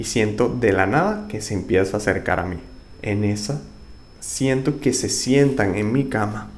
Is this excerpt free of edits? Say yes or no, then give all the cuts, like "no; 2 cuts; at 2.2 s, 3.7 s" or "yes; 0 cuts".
yes; 0 cuts